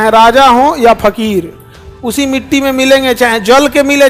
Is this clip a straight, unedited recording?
yes; 0 cuts

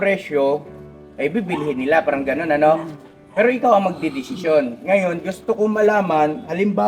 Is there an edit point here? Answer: no; 0 cuts

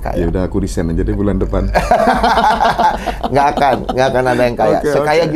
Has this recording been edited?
no; 0 cuts

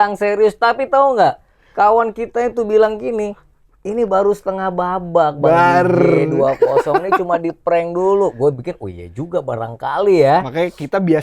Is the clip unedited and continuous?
yes; 0 cuts

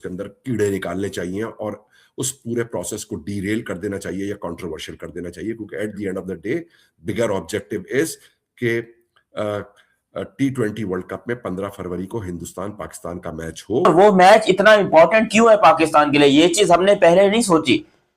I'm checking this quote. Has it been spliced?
yes; 1 cut; at 13.9 s

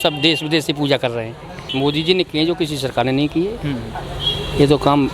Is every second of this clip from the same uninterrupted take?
no; 1 cut; at 1.7 s

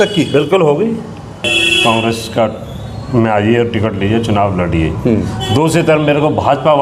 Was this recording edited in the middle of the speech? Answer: yes; 1 cut; at 1.6 s

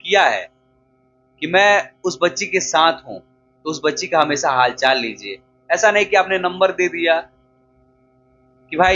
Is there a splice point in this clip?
no; 0 cuts

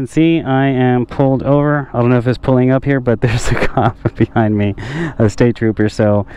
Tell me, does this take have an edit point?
no; 0 cuts

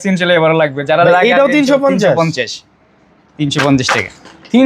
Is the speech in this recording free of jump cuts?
yes; 0 cuts

